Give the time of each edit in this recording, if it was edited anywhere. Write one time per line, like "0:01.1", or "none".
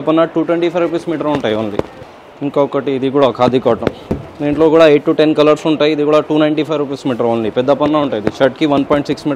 none